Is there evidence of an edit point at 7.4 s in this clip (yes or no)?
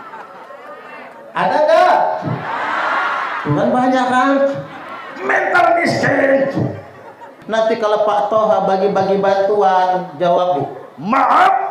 yes